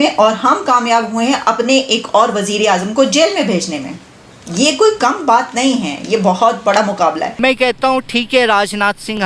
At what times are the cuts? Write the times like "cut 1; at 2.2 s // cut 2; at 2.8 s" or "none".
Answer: cut 1; at 7.3 s